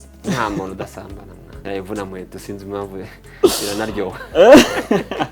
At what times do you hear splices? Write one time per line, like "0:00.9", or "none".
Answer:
0:01.6